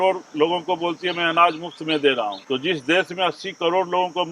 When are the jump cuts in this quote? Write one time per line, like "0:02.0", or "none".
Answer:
0:02.4